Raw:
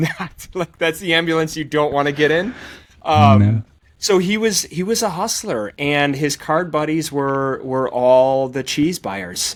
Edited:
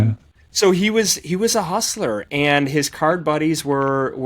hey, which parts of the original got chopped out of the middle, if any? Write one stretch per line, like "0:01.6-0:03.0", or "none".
none